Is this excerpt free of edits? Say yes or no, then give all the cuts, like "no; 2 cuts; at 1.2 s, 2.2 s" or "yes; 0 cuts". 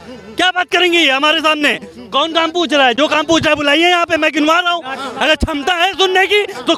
yes; 0 cuts